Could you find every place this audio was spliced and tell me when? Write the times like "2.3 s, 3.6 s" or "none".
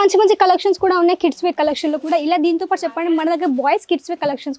none